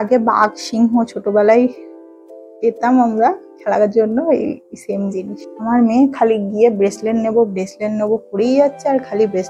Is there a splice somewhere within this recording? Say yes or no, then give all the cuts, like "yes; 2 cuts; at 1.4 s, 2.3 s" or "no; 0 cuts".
yes; 1 cut; at 5.3 s